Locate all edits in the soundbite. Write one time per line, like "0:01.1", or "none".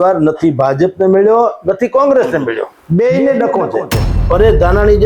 0:02.7
0:04.3